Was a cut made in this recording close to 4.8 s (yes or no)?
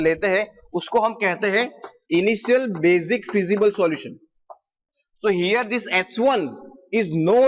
yes